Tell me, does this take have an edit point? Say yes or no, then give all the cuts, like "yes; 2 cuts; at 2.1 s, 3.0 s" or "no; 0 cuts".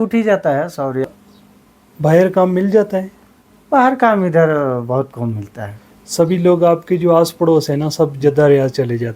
yes; 1 cut; at 1.1 s